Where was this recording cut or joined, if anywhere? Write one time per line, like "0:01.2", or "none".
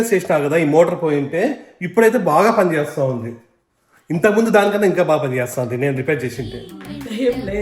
none